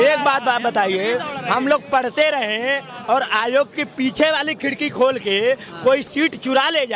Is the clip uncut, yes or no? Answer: yes